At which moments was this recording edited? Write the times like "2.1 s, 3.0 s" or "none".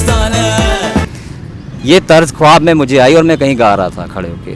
none

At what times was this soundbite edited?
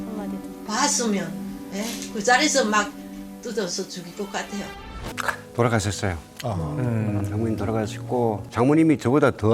5.1 s, 8.4 s

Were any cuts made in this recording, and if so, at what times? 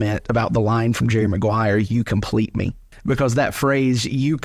2.9 s

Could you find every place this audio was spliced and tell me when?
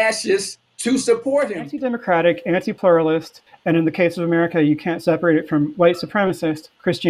1.7 s

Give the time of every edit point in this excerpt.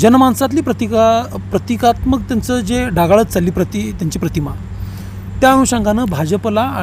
none

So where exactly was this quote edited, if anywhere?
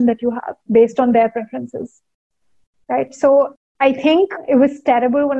4.1 s

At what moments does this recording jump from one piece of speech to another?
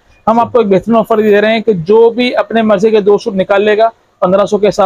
none

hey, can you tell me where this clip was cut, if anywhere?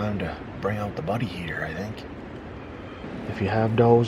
3.0 s

